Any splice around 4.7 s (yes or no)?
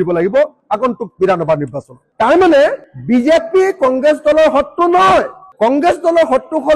no